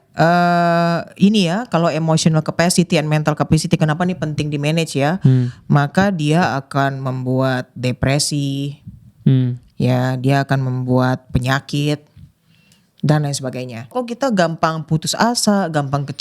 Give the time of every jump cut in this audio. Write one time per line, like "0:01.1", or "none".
0:13.9